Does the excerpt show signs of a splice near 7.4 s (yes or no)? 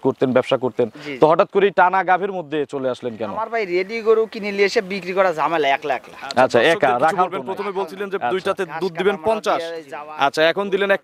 yes